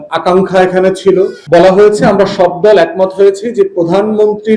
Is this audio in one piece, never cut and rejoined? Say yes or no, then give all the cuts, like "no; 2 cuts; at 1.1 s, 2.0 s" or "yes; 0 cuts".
no; 1 cut; at 1.4 s